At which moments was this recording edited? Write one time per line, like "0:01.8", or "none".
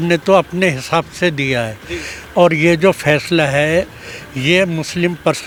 none